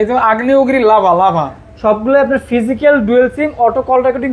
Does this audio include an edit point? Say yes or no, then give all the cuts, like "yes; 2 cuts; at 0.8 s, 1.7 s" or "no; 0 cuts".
yes; 1 cut; at 1.6 s